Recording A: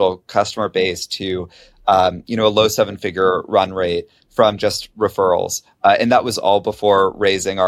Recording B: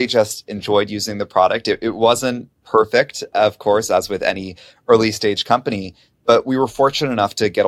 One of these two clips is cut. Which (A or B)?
B